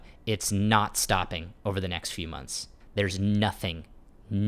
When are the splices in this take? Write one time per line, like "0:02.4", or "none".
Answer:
0:02.8